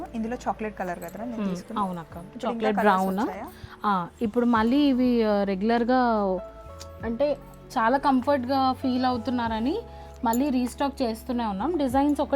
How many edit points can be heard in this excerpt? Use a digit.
0